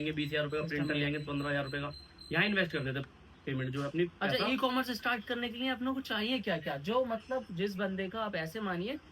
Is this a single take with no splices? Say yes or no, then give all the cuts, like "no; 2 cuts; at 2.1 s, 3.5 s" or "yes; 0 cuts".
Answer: yes; 0 cuts